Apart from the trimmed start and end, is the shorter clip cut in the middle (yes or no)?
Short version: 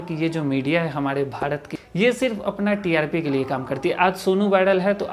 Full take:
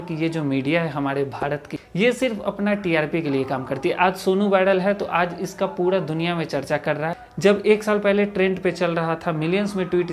no